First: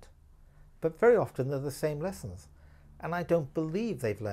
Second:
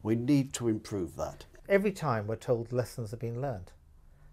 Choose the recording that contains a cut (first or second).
second